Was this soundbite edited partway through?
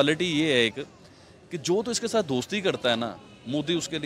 no; 0 cuts

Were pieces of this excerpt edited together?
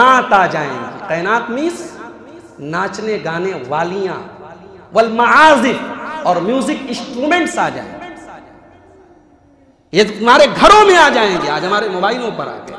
no; 0 cuts

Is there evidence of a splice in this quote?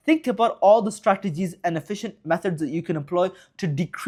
no; 0 cuts

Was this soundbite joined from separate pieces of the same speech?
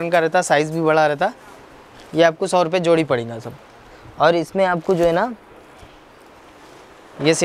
no; 0 cuts

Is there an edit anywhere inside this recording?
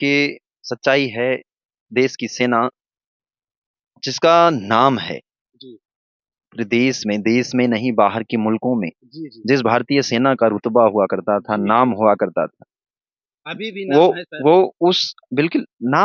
no; 0 cuts

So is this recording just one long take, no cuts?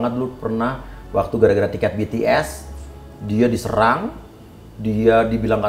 yes; 0 cuts

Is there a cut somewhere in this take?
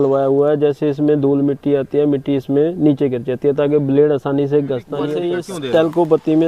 yes; 1 cut; at 5.2 s

